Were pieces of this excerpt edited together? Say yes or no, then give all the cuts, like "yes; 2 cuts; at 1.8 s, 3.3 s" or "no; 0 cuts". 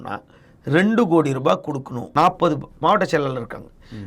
yes; 1 cut; at 1.9 s